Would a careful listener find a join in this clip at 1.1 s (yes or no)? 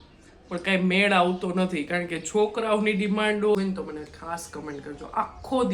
no